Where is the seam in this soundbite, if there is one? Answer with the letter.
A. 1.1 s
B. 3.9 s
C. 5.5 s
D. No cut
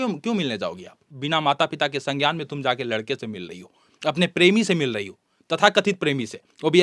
A